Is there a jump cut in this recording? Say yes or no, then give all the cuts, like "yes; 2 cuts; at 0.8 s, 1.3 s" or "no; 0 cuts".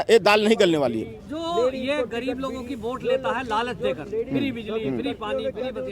no; 0 cuts